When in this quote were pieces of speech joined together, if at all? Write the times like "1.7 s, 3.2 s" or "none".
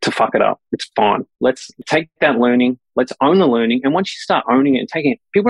1.4 s